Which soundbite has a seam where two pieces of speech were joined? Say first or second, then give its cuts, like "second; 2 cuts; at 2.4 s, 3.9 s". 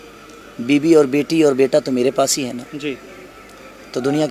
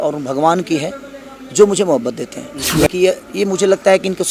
second; 1 cut; at 2.7 s